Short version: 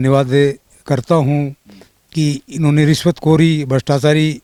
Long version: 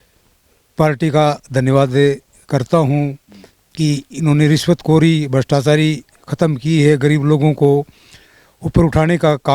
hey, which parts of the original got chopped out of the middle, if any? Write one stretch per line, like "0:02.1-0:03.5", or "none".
none